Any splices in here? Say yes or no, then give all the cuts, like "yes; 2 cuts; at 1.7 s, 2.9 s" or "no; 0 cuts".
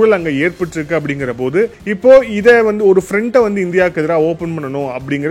yes; 1 cut; at 1.8 s